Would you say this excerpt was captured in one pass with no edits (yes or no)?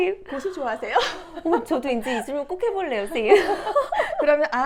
yes